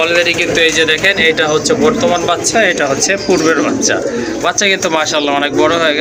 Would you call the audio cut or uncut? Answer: uncut